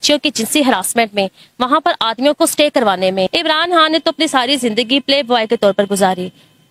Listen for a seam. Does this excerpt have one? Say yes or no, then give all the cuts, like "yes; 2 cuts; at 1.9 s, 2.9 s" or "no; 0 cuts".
yes; 1 cut; at 3.3 s